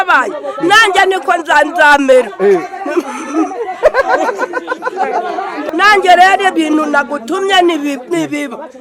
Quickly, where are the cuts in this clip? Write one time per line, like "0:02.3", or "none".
0:05.7